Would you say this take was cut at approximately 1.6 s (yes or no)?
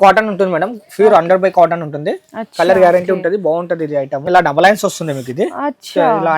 no